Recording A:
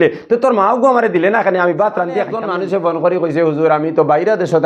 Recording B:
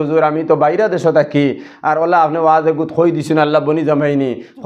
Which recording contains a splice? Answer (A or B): A